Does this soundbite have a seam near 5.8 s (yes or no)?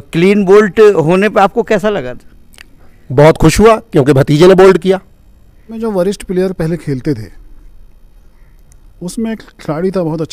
yes